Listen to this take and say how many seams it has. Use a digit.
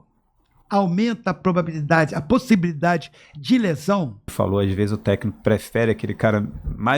1